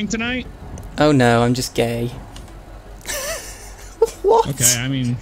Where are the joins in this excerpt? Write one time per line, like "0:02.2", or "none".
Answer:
none